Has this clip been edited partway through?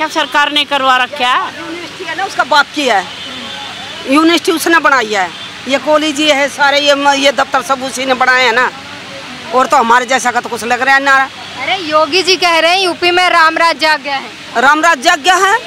no; 0 cuts

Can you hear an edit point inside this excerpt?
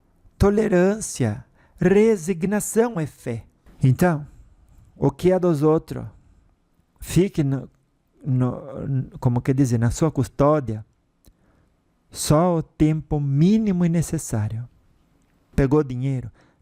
yes; 2 cuts; at 3.6 s, 15.5 s

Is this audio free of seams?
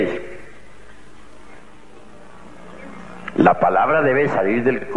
yes; 0 cuts

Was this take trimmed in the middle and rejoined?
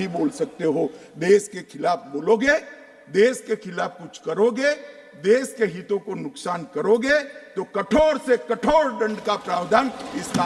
no; 0 cuts

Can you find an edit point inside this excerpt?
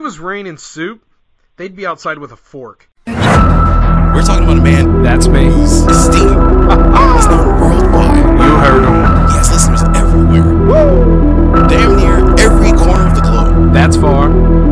yes; 1 cut; at 2.9 s

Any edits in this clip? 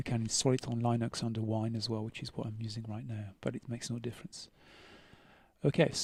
no; 0 cuts

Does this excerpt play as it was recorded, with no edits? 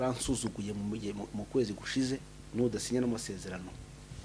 no; 1 cut; at 2.4 s

